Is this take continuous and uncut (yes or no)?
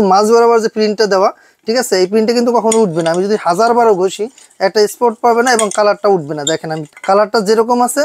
no